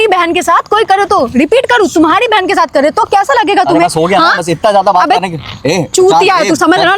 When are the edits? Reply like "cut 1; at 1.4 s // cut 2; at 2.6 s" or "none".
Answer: none